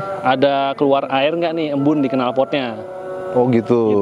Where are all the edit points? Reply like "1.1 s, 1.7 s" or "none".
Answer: none